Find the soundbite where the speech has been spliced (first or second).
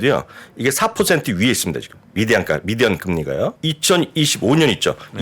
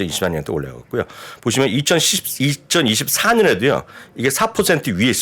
first